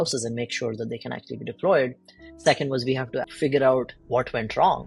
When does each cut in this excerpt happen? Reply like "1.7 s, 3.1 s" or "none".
3.2 s, 4.0 s